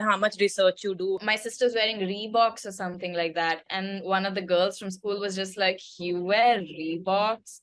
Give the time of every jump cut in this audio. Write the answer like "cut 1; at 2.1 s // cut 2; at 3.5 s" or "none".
cut 1; at 1.3 s